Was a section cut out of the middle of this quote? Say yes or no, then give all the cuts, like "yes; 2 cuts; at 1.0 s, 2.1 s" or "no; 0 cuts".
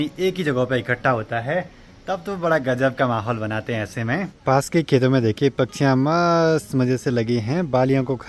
no; 0 cuts